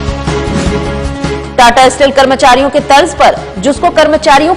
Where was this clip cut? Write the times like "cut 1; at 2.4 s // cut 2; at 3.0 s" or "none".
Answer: cut 1; at 1.3 s